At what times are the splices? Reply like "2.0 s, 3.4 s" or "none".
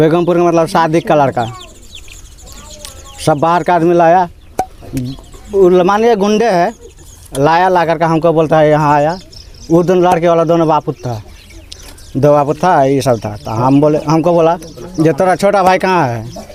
none